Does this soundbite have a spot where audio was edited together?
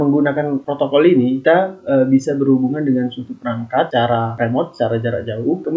no; 0 cuts

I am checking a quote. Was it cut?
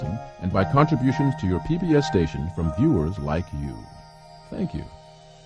no; 0 cuts

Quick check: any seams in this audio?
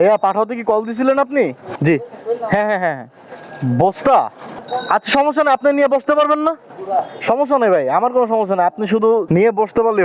no; 0 cuts

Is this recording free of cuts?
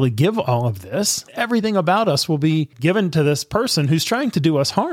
no; 2 cuts; at 1.2 s, 2.7 s

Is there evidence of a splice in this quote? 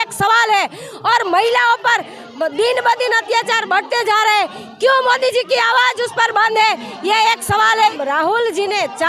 yes; 1 cut; at 7.9 s

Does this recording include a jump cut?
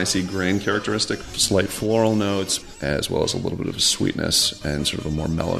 yes; 2 cuts; at 1.2 s, 2.6 s

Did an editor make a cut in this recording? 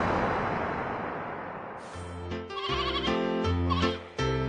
yes; 1 cut; at 2.1 s

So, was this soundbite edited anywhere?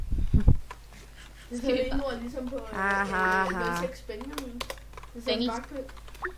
no; 0 cuts

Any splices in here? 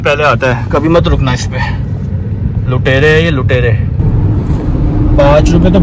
no; 0 cuts

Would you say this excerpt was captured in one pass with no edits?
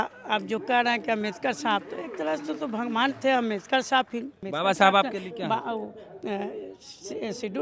no; 1 cut; at 4.4 s

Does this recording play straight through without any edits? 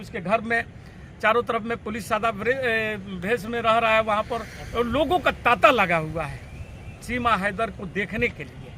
yes; 0 cuts

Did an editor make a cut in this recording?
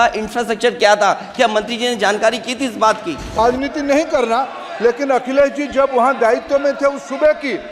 yes; 1 cut; at 3.4 s

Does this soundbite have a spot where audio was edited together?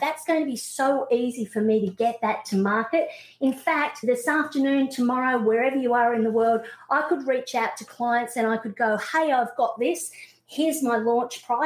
no; 0 cuts

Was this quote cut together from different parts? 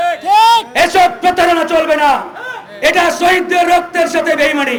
no; 0 cuts

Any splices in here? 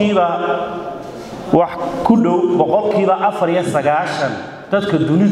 no; 0 cuts

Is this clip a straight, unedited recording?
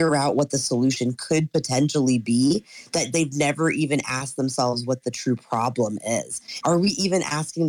no; 1 cut; at 6.5 s

